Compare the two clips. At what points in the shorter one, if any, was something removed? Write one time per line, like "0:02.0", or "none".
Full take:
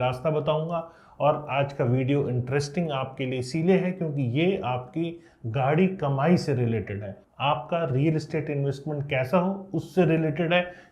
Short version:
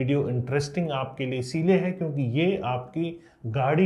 none